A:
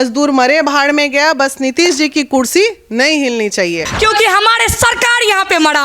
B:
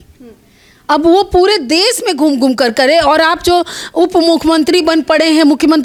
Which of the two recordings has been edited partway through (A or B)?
A